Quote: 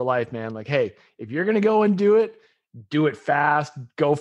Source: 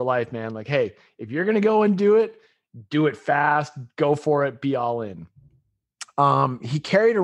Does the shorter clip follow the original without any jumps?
yes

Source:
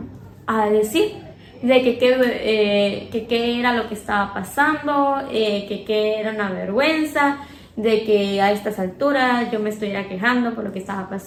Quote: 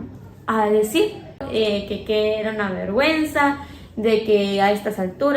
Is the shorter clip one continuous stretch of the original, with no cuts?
no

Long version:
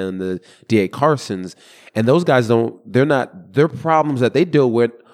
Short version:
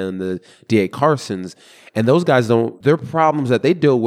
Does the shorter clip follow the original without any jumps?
no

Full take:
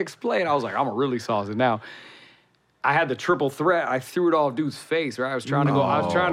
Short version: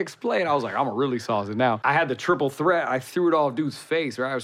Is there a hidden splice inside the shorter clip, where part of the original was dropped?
yes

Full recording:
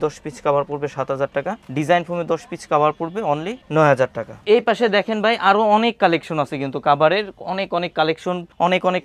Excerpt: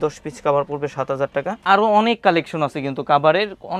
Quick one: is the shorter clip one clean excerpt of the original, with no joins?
no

